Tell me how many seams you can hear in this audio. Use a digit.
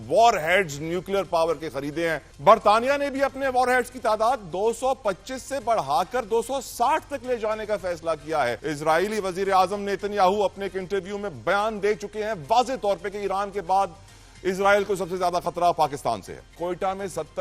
3